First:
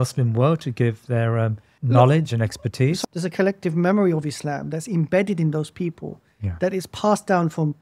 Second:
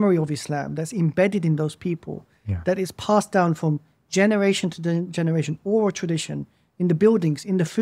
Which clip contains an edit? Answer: first; 2 cuts; at 1.7 s, 3.0 s

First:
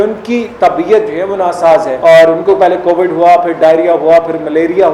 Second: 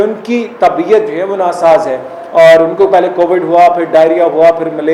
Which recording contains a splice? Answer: first; 1 cut; at 1.9 s

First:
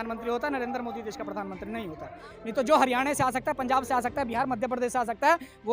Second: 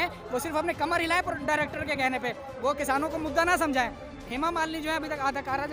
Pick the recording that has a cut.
first; 1 cut; at 2.3 s

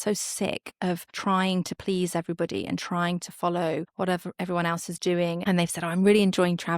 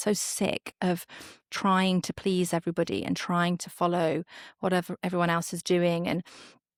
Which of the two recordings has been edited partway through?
first; 3 cuts; at 1.1 s, 3.9 s, 5.4 s

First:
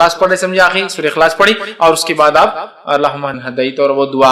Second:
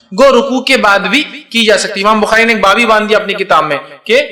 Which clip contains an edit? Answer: first; 1 cut; at 3.4 s

